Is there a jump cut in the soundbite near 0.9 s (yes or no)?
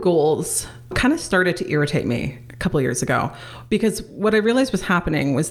yes